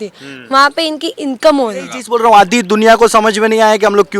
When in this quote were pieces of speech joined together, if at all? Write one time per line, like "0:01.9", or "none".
0:02.0